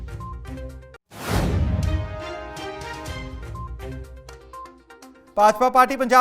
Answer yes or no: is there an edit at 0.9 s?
yes